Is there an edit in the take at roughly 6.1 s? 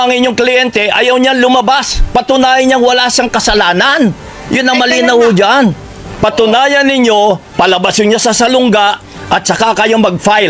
yes; 1 cut; at 6.1 s

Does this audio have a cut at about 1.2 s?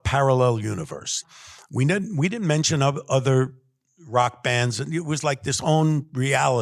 yes; 1 cut; at 1.2 s

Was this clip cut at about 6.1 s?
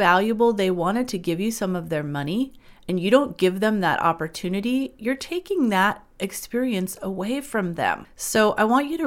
no; 1 cut; at 8.1 s

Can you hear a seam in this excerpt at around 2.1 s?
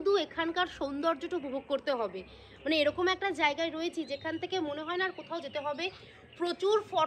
no; 0 cuts

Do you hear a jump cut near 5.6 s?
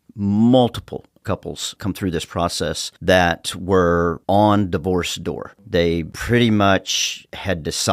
no; 2 cuts; at 1.1 s, 2.9 s

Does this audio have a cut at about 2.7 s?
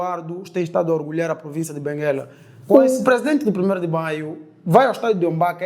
yes; 1 cut; at 2.7 s

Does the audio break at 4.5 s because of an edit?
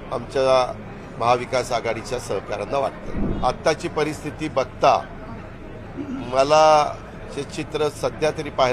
no; 1 cut; at 3.2 s

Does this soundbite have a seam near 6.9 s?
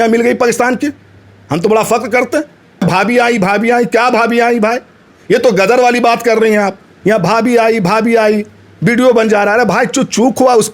yes; 2 cuts; at 2.7 s, 6.9 s

